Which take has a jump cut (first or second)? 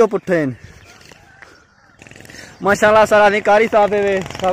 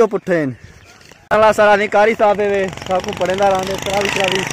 second